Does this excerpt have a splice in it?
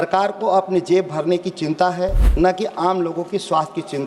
yes; 1 cut; at 2.2 s

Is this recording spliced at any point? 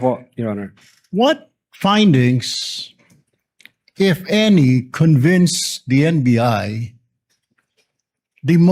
no; 0 cuts

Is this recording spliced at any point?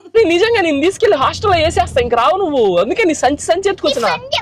no; 0 cuts

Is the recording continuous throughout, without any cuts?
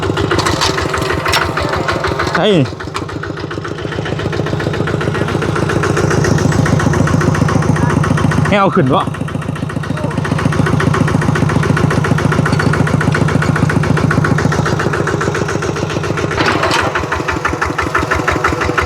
no; 1 cut; at 16.4 s

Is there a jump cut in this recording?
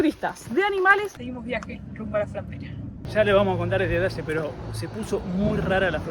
yes; 2 cuts; at 1.1 s, 3.0 s

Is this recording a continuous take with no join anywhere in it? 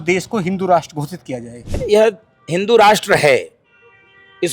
no; 1 cut; at 1.8 s

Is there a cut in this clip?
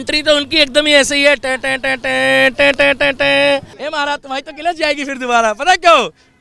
yes; 1 cut; at 3.8 s

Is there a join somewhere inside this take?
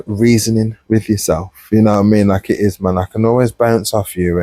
no; 0 cuts

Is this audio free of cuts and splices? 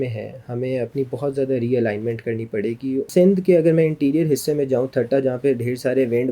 no; 1 cut; at 3.1 s

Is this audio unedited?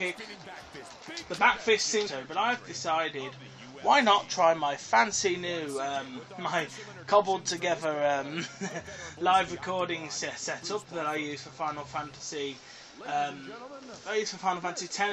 yes; 0 cuts

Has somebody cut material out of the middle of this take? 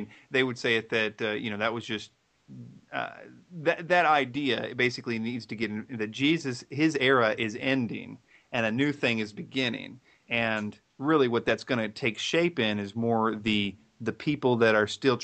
no; 0 cuts

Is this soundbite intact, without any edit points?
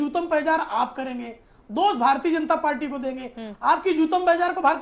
yes; 0 cuts

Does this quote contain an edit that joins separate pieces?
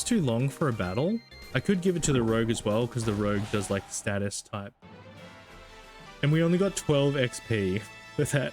yes; 2 cuts; at 1.4 s, 6.0 s

